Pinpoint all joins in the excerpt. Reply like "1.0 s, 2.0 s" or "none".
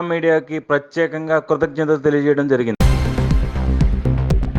2.8 s